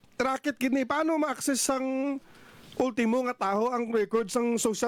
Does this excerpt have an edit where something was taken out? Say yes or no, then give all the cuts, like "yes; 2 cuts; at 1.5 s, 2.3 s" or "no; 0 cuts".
no; 0 cuts